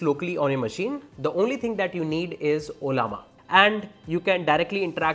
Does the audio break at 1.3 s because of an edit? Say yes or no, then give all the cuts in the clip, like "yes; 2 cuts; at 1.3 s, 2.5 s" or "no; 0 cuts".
no; 1 cut; at 3.3 s